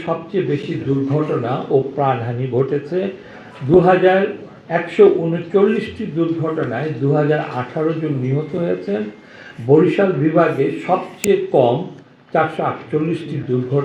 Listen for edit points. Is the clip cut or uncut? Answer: uncut